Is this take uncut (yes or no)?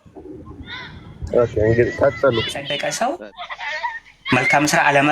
no